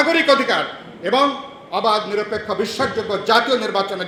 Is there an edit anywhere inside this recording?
no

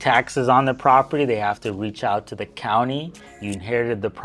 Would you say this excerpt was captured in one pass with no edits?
no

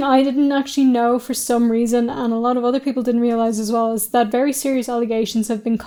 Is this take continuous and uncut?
yes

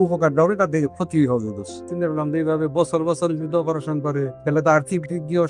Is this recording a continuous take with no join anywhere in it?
no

